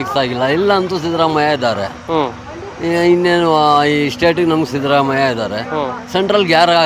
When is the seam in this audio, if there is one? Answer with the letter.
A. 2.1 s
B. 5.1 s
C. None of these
C